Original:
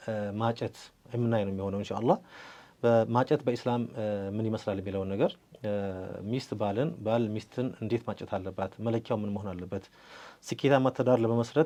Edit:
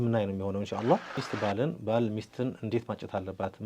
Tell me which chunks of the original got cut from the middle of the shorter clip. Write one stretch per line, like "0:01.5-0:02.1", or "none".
0:02.5-0:06.5